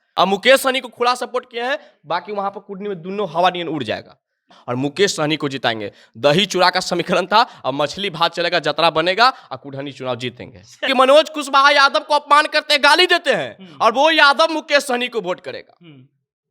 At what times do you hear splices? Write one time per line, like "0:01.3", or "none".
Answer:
0:04.6
0:10.8